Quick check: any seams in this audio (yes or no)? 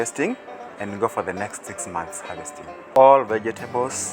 yes